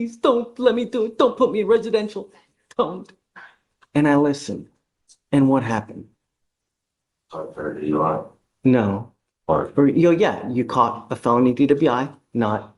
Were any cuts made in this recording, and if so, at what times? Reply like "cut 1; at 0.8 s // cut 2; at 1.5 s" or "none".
none